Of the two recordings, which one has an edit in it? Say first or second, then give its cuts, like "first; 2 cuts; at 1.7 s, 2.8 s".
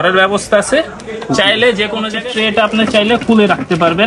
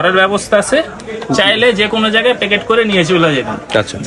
first; 1 cut; at 2.1 s